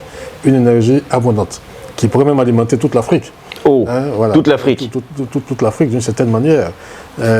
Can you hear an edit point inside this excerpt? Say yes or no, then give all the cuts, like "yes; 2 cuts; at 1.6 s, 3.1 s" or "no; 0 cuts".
no; 0 cuts